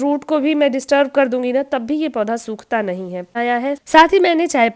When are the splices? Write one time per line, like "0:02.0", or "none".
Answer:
0:03.4